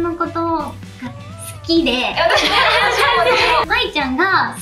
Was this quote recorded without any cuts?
no; 1 cut; at 3.6 s

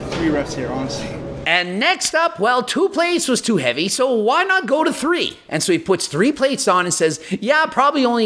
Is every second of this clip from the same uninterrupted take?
yes; 0 cuts

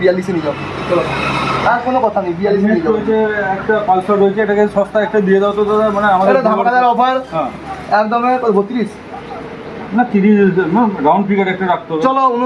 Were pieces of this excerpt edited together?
no; 0 cuts

